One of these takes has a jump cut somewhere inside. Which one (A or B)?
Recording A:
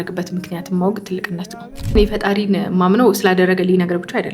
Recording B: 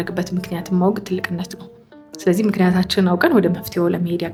A